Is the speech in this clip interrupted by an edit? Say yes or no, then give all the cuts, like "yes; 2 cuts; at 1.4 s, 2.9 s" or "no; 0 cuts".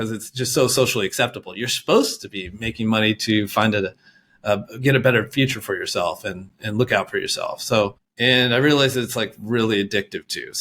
yes; 1 cut; at 8.1 s